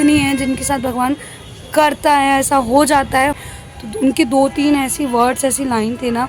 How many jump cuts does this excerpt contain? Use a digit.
1